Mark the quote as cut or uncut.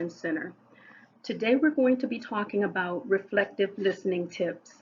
cut